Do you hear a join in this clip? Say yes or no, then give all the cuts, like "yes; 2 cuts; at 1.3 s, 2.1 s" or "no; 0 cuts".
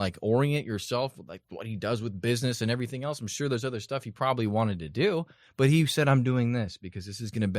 no; 0 cuts